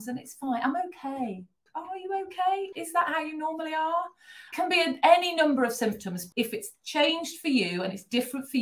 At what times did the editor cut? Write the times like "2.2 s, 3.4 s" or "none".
1.6 s, 2.7 s, 4.5 s, 6.2 s